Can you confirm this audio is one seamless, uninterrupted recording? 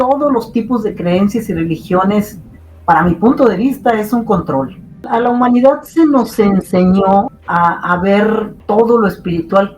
no; 3 cuts; at 5.1 s, 7.4 s, 8.5 s

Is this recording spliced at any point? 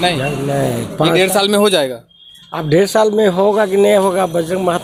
no; 0 cuts

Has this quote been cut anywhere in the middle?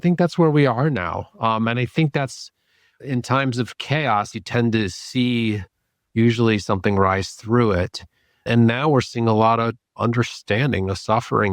yes; 1 cut; at 4.3 s

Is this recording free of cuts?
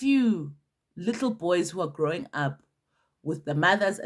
yes; 0 cuts

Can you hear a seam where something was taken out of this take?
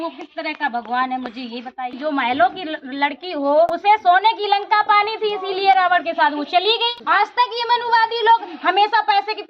yes; 3 cuts; at 1.9 s, 3.7 s, 6.9 s

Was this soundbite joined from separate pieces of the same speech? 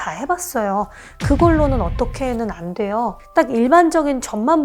yes; 1 cut; at 3.2 s

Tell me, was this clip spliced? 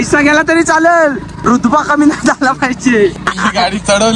yes; 2 cuts; at 1.3 s, 3.2 s

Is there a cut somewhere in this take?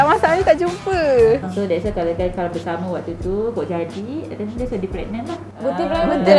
yes; 1 cut; at 1.4 s

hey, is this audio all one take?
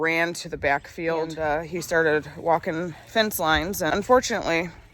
no; 2 cuts; at 1.3 s, 3.9 s

